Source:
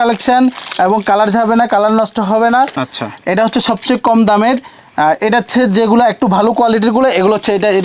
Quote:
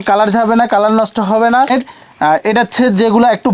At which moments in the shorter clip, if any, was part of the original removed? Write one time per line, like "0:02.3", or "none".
0:01.7